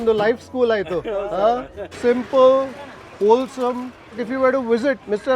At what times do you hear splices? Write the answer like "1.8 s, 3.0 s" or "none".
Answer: 1.9 s, 4.2 s